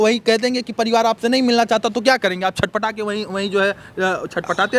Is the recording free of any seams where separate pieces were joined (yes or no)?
yes